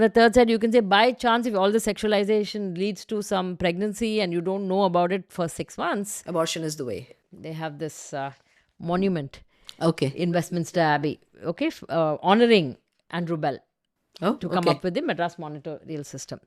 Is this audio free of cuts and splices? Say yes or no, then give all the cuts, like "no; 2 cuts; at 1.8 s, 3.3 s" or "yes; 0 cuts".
no; 1 cut; at 7.2 s